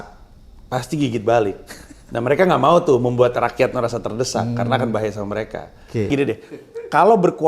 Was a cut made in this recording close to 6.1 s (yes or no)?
yes